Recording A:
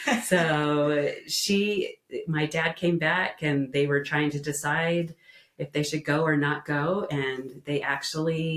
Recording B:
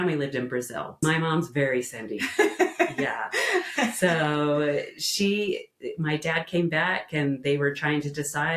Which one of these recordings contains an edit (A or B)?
B